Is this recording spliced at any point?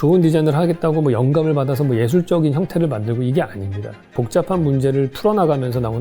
yes; 1 cut; at 4.1 s

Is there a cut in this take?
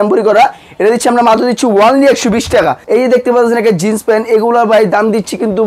yes; 1 cut; at 2.8 s

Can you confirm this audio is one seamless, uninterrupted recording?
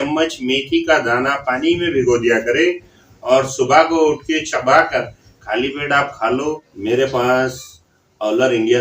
no; 1 cut; at 6.7 s

